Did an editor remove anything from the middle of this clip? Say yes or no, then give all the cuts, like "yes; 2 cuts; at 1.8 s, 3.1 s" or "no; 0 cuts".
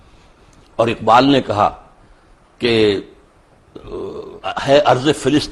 no; 0 cuts